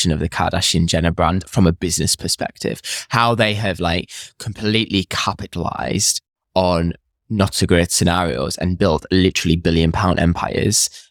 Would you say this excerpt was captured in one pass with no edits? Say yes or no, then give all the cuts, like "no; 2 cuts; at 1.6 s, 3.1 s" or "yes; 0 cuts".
yes; 0 cuts